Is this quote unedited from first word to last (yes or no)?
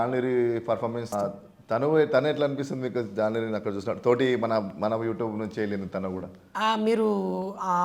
no